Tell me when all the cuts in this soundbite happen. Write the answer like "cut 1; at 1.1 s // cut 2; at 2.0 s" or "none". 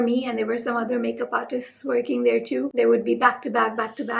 cut 1; at 2.7 s